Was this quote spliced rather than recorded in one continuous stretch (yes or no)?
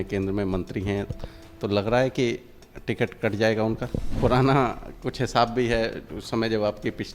yes